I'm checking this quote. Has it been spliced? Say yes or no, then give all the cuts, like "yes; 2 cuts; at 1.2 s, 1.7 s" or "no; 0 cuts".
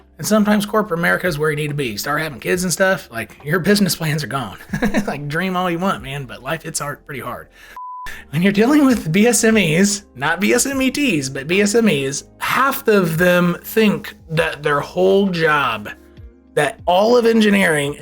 yes; 1 cut; at 7.7 s